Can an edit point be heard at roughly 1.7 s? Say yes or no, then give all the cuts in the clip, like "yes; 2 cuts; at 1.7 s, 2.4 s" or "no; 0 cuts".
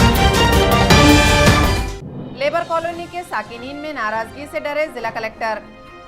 yes; 1 cut; at 1.7 s